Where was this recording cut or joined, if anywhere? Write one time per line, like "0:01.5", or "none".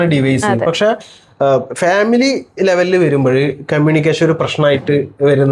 none